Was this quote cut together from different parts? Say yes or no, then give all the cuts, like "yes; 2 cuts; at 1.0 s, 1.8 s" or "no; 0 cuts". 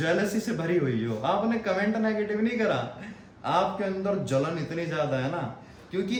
no; 0 cuts